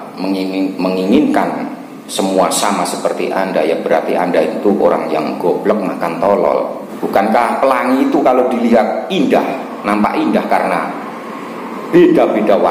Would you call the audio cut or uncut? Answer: cut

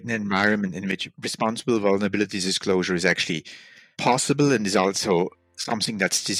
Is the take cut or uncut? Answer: uncut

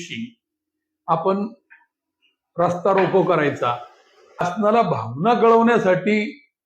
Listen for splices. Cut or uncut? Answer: cut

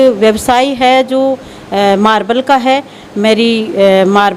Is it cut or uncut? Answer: uncut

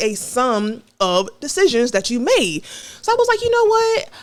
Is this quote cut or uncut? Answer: uncut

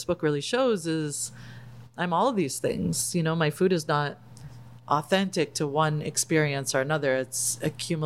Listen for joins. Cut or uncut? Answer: uncut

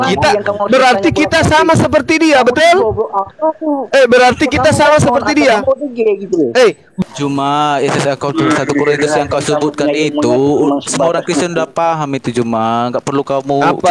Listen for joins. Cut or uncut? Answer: cut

